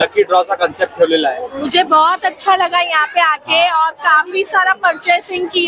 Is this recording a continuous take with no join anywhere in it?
no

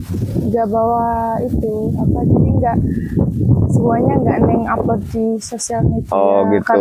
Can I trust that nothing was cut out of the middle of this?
yes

